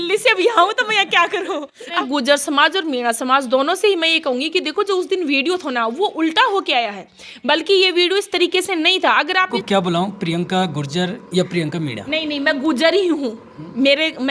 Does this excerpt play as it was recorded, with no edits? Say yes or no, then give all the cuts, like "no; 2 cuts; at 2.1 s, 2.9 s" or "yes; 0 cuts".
no; 2 cuts; at 2.0 s, 9.6 s